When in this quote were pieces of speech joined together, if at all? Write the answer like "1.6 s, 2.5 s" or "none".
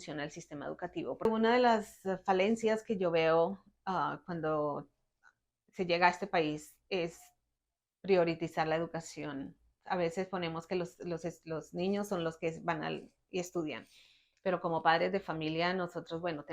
1.3 s